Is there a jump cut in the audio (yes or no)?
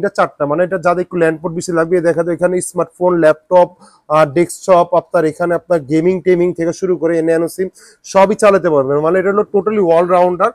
no